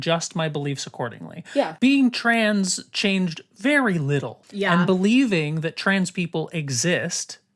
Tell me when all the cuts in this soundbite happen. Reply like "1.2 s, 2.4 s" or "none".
1.7 s, 4.4 s